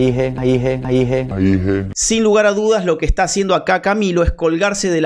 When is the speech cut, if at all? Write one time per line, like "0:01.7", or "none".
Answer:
0:01.9